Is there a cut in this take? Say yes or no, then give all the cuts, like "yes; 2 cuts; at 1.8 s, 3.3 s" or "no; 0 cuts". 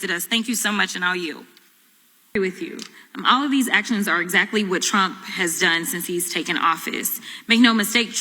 yes; 1 cut; at 2.4 s